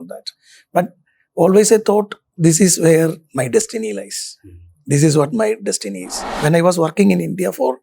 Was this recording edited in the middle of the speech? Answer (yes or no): yes